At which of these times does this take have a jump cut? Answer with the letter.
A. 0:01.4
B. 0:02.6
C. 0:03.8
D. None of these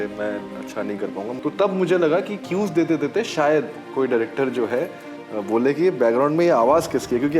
A